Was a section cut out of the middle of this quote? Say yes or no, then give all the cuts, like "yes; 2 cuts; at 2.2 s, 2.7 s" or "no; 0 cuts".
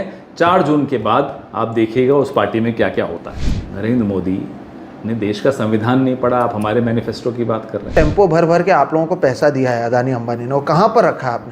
yes; 2 cuts; at 3.4 s, 7.9 s